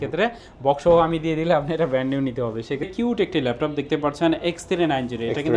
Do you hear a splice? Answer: yes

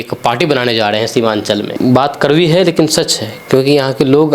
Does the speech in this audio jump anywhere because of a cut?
yes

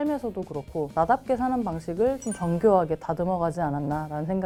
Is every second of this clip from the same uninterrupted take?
yes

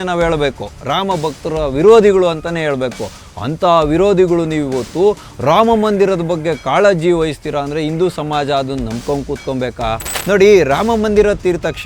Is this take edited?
yes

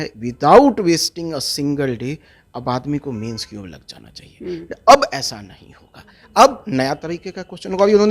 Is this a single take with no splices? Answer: no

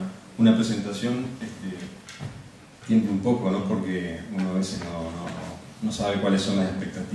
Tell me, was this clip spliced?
no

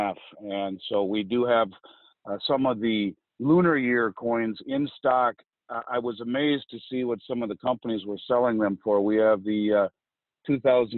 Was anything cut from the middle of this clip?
no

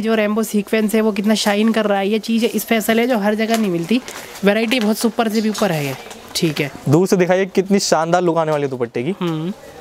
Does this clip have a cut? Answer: no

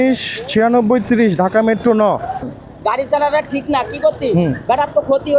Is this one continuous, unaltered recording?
no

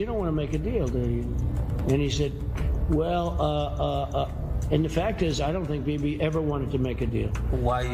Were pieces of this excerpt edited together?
no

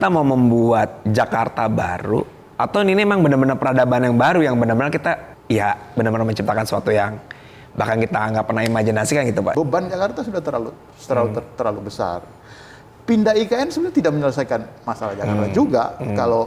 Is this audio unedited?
no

